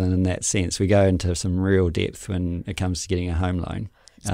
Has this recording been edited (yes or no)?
no